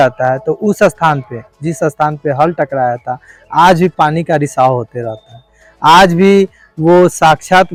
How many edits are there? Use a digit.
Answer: 0